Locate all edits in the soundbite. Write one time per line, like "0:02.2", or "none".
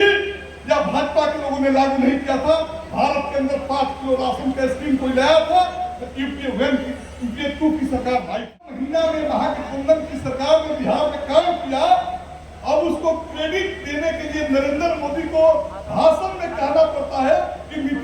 0:08.8